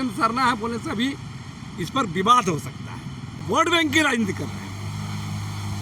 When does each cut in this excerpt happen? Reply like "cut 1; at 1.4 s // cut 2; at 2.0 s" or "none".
cut 1; at 3.4 s